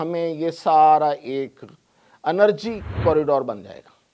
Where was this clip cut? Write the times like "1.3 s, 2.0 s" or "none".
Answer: 2.9 s